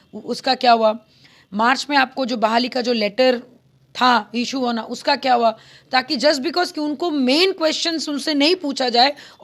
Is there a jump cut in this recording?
no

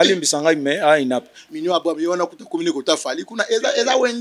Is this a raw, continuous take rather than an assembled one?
no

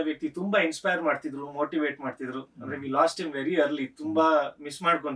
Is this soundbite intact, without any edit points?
yes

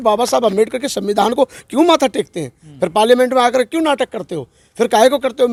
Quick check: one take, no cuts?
yes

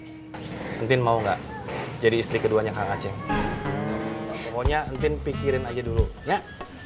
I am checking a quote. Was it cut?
yes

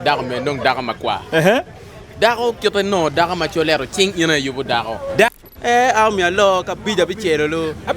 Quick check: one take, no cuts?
no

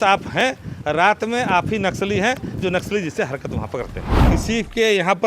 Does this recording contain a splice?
yes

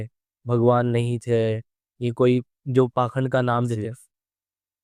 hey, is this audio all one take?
yes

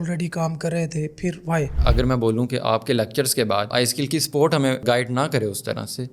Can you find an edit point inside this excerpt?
yes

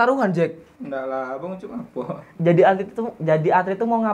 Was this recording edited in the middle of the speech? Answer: yes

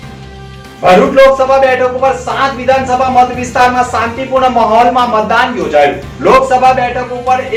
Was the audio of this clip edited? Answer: no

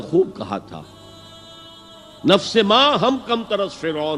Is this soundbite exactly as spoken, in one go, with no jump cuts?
yes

